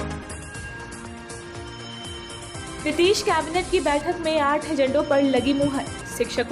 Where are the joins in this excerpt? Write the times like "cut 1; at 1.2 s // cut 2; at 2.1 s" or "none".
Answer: cut 1; at 1.3 s